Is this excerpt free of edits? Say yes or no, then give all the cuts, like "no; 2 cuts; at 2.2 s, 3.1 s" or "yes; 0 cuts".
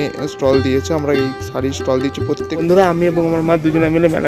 no; 1 cut; at 2.6 s